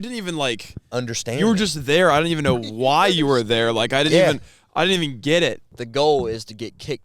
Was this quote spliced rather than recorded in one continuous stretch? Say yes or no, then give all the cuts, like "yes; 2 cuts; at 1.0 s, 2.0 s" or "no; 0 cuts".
yes; 1 cut; at 5.7 s